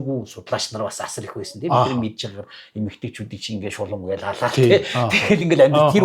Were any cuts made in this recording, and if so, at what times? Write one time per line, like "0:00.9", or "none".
none